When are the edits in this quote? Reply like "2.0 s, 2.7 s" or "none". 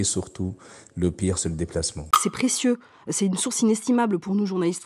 2.2 s